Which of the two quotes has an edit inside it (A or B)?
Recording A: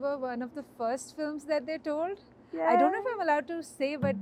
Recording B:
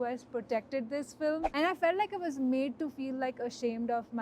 B